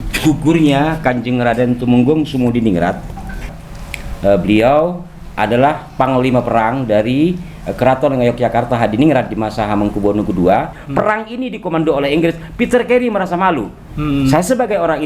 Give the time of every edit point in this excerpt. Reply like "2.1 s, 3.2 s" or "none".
3.6 s, 10.8 s